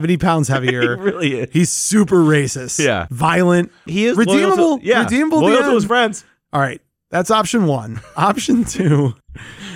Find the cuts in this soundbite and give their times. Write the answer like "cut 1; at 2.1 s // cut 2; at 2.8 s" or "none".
cut 1; at 3.1 s // cut 2; at 3.9 s